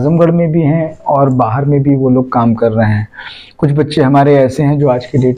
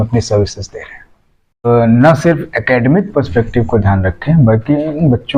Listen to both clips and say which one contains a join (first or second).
second